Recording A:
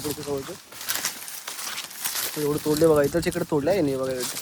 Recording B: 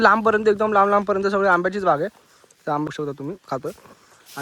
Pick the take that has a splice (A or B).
B